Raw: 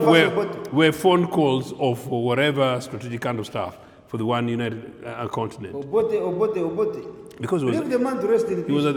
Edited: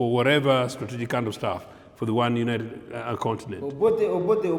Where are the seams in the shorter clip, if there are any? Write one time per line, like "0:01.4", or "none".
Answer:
none